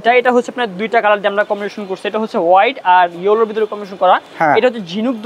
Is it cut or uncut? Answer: uncut